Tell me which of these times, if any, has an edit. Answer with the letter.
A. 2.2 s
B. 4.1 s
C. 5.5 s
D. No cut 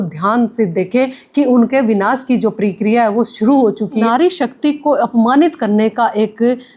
B